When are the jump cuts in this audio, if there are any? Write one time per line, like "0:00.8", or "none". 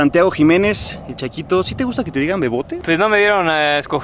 0:02.7